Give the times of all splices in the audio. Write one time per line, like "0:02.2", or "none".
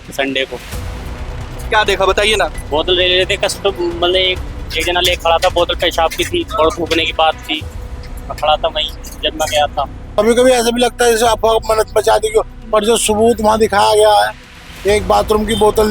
0:10.2